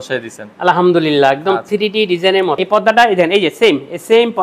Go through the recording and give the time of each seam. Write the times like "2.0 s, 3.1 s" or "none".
2.6 s